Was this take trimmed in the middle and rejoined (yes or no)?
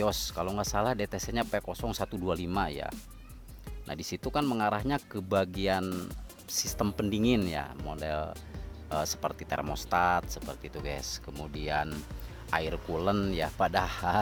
no